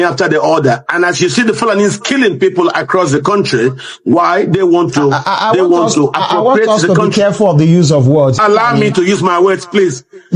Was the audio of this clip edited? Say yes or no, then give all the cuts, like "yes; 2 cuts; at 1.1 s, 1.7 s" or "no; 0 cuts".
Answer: yes; 1 cut; at 8.4 s